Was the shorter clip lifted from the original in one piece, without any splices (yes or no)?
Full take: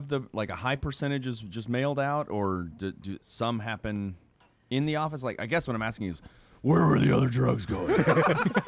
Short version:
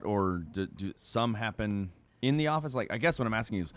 no